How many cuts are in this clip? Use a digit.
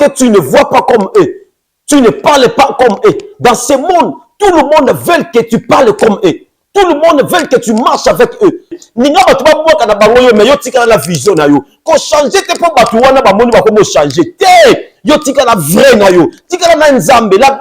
1